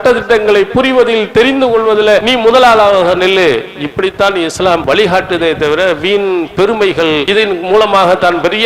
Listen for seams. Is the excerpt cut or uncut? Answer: cut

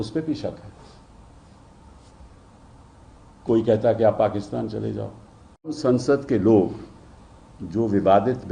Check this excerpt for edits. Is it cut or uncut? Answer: cut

